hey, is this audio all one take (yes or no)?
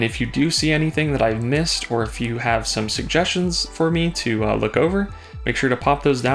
yes